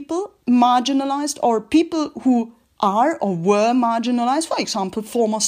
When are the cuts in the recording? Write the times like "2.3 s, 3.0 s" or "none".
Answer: none